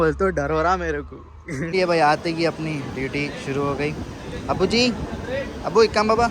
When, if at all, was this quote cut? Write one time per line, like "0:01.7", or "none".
0:01.7

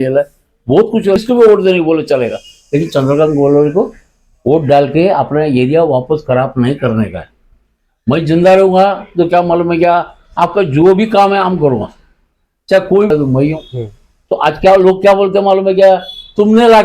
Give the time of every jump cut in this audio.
0:01.2
0:13.1

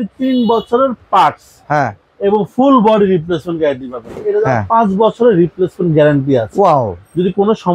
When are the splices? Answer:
0:04.1

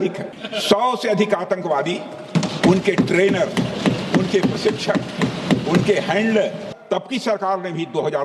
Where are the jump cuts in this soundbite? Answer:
0:06.7

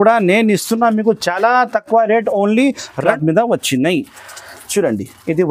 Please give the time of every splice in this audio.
0:03.1

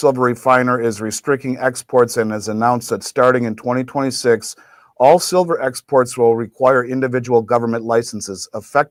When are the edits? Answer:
none

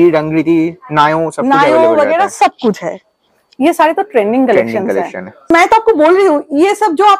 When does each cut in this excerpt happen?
0:05.5

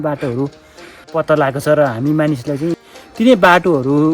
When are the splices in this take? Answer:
0:01.1
0:02.7

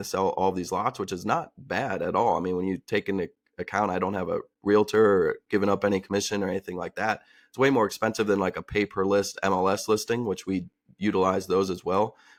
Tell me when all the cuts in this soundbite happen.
none

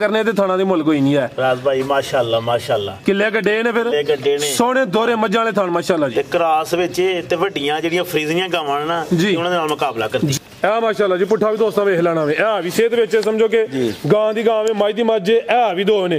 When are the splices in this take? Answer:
0:10.3

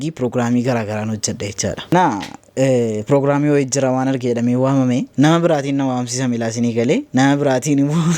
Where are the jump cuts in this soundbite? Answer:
0:01.9

